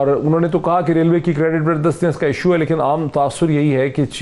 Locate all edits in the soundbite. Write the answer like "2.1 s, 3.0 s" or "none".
none